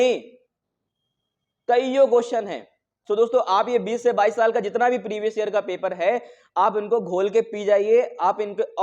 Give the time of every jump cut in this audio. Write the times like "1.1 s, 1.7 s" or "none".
none